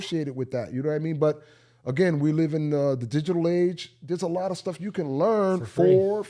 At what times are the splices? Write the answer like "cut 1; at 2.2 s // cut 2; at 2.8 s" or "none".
none